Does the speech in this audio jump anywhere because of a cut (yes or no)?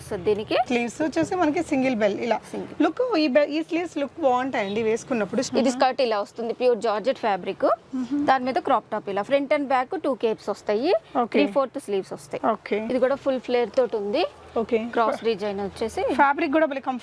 yes